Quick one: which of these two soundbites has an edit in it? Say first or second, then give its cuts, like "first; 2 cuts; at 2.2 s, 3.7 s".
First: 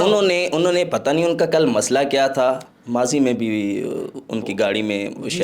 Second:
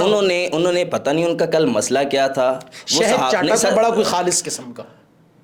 first; 1 cut; at 2.7 s